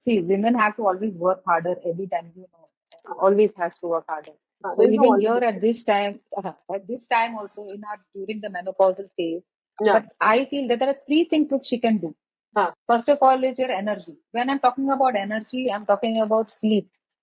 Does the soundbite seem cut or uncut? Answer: uncut